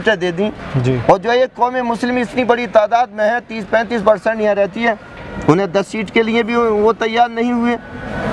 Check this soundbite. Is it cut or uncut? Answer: uncut